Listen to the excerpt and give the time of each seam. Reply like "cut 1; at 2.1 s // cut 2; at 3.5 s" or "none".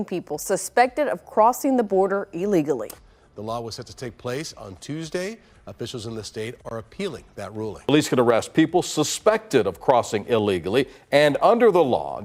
none